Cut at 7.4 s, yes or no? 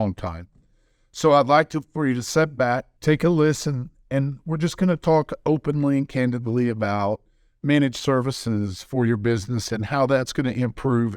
no